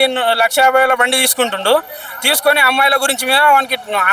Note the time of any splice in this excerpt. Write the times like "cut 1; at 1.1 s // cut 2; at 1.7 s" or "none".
none